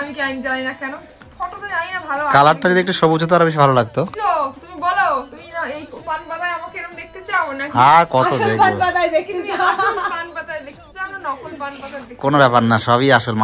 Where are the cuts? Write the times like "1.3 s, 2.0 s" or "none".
4.1 s